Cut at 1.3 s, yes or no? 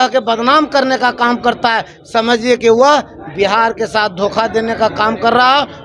no